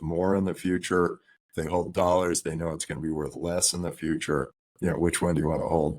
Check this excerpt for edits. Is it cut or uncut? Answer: cut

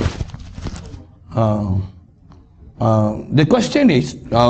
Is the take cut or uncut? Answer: uncut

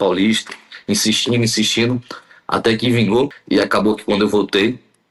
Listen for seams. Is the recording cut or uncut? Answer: cut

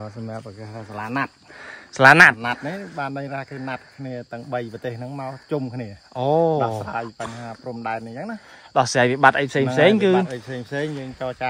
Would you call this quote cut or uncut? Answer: uncut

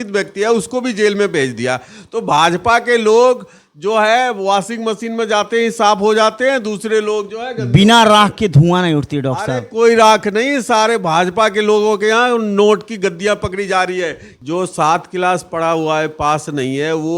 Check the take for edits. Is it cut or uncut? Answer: cut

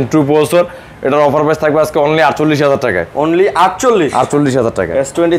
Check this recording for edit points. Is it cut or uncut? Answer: uncut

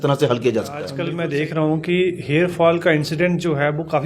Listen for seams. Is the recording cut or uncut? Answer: cut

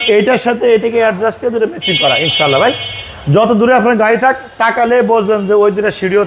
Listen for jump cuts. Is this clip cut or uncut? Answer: uncut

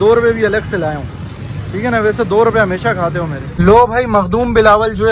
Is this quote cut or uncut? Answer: cut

